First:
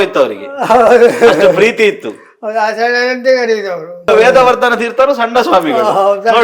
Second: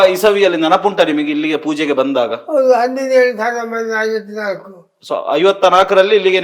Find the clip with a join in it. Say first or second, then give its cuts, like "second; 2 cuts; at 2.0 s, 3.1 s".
first; 1 cut; at 4.1 s